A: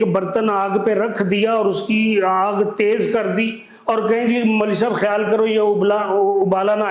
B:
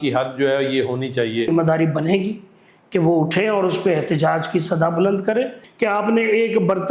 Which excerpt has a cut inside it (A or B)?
B